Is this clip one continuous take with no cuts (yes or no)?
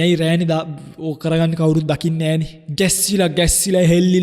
no